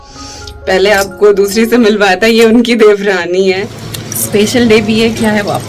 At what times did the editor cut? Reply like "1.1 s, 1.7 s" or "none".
3.8 s